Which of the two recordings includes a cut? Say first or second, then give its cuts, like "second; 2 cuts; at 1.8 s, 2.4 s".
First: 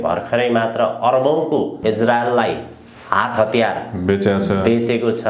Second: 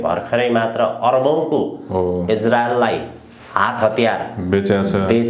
first; 1 cut; at 1.8 s